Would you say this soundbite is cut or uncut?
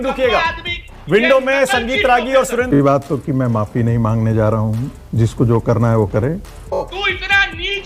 cut